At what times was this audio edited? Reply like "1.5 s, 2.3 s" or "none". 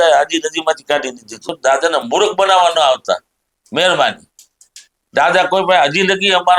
1.5 s